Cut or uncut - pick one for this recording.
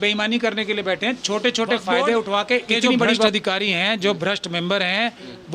cut